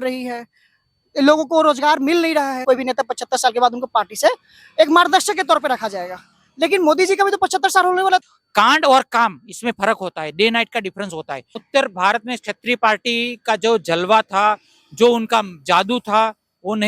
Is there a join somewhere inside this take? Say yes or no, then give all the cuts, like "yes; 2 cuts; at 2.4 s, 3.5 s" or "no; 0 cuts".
yes; 3 cuts; at 2.6 s, 8.3 s, 11.6 s